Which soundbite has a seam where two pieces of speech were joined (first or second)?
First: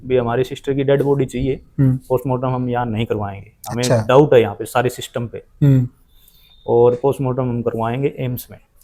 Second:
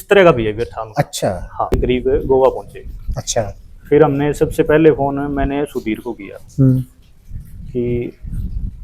second